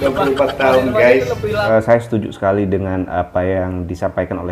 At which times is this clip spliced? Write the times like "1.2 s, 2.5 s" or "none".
1.7 s